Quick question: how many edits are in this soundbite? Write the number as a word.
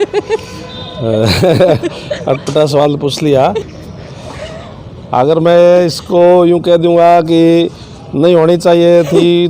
one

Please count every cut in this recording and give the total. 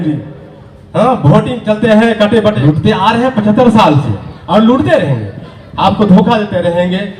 one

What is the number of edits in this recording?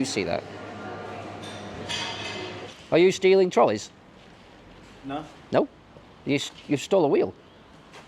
one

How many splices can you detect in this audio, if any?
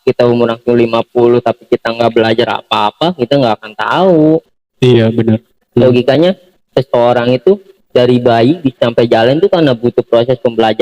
one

